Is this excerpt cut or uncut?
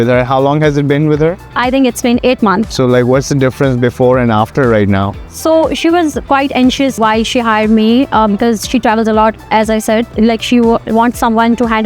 cut